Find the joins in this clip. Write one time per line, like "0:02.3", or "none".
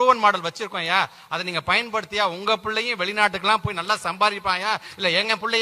none